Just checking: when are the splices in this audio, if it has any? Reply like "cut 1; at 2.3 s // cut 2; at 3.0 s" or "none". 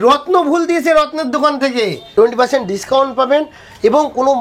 cut 1; at 2.0 s